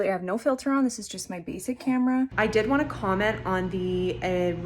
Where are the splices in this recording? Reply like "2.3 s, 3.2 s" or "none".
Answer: 2.3 s